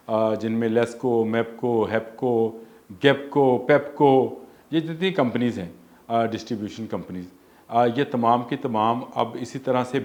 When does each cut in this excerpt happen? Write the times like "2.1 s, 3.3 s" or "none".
none